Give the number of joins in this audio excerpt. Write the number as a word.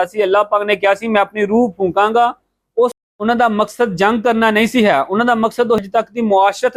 two